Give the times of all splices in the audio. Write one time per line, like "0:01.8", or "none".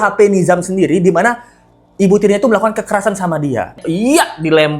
0:03.8